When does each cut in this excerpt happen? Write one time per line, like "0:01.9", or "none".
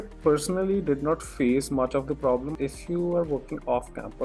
0:02.5